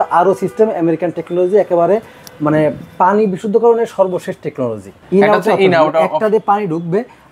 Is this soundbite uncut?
no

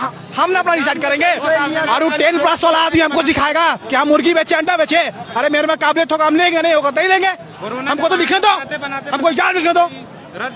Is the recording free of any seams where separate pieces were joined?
yes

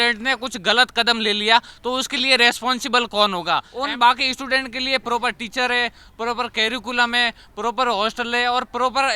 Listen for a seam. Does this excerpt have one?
yes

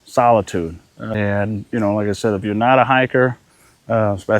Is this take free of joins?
no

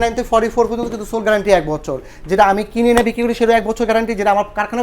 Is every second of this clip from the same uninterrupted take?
yes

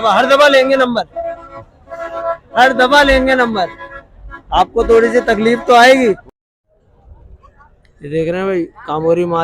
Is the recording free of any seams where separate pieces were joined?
no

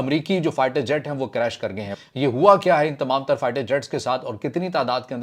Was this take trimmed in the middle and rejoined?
yes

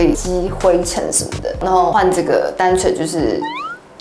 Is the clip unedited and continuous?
no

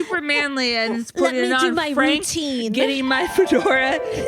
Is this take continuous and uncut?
yes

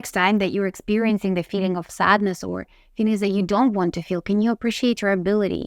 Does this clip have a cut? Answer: no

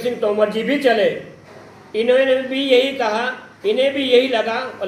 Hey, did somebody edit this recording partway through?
no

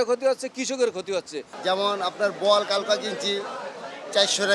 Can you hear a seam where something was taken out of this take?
yes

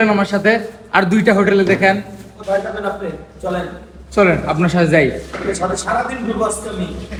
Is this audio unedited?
yes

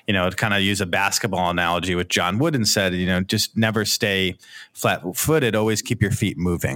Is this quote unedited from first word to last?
no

